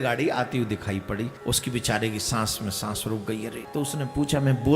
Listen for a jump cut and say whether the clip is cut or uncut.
cut